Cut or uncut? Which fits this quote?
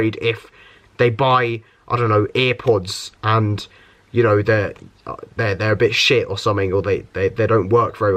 uncut